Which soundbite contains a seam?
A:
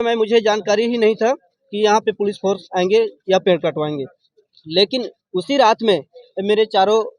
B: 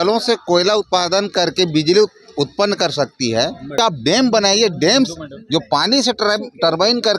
B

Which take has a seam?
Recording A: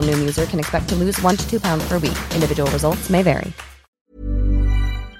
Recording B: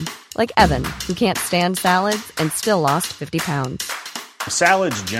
A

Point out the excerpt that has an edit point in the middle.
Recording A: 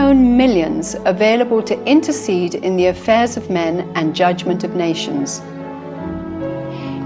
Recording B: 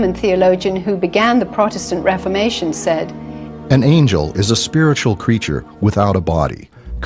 B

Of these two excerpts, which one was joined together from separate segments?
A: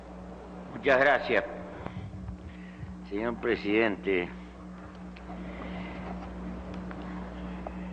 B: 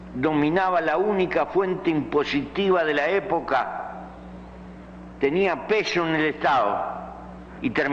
B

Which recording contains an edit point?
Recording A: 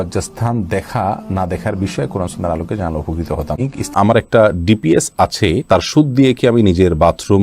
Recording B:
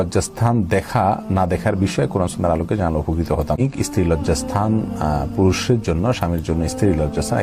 A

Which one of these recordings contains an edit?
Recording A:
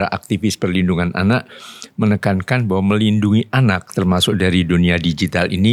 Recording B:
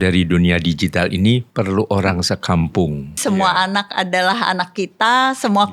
B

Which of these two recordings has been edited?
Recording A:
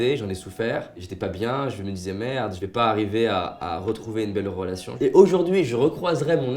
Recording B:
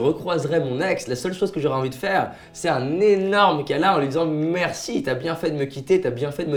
A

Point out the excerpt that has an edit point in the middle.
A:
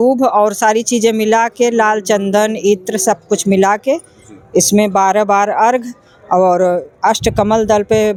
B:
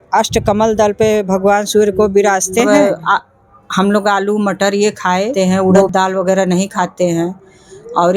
B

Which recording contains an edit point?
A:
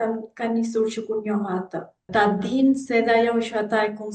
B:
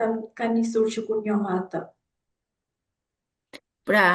A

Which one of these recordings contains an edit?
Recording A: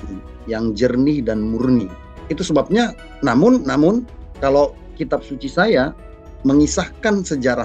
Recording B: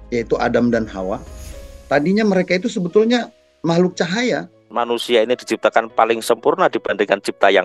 B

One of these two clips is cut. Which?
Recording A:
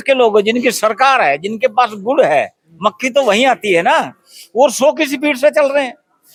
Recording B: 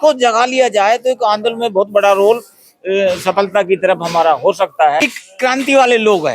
B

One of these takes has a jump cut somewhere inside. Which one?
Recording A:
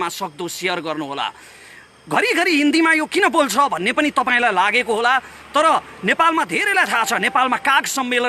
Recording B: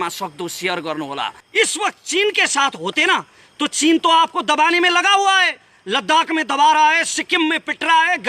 B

